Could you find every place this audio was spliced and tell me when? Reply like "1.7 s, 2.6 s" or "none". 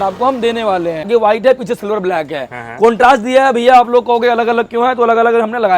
1.1 s